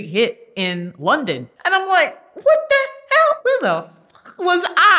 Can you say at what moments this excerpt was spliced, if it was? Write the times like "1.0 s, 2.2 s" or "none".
1.5 s, 3.4 s

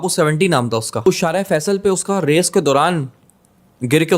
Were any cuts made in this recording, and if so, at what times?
1.1 s

